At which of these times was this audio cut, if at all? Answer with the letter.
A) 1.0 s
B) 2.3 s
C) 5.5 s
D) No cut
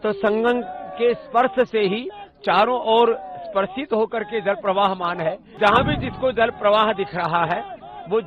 C